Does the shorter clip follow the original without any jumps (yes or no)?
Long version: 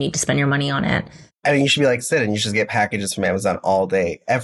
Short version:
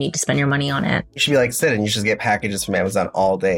no